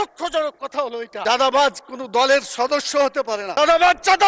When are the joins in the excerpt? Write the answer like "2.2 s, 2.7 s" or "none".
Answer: 1.1 s